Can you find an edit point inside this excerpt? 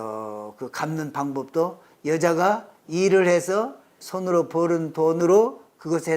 yes; 2 cuts; at 4.0 s, 5.2 s

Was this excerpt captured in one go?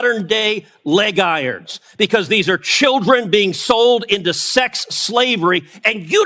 yes; 0 cuts

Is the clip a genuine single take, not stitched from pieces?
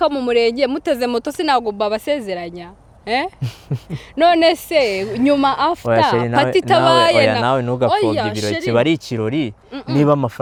yes; 0 cuts

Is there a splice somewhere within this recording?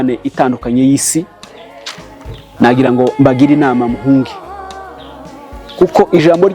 yes; 2 cuts; at 4.3 s, 5.8 s

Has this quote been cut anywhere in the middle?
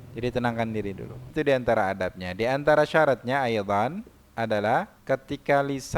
yes; 2 cuts; at 1.3 s, 4.9 s

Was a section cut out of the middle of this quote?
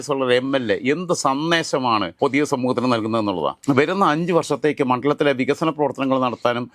no; 0 cuts

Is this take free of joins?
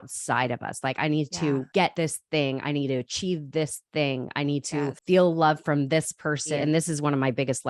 no; 3 cuts; at 1.8 s, 5.0 s, 6.6 s

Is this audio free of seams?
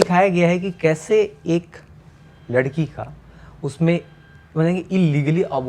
yes; 0 cuts

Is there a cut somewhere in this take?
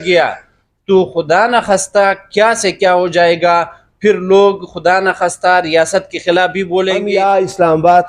yes; 1 cut; at 7.0 s

